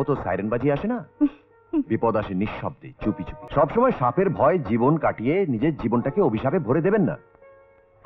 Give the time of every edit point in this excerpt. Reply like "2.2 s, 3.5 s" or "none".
3.3 s